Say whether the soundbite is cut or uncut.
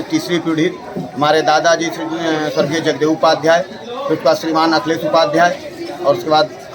uncut